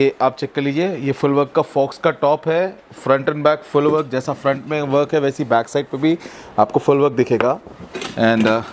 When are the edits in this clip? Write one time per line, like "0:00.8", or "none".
none